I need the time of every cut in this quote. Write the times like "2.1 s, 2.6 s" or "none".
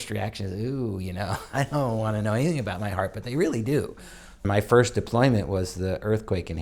4.5 s